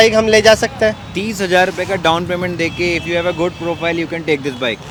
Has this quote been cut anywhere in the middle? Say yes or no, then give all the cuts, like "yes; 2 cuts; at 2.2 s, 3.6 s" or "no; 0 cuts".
no; 0 cuts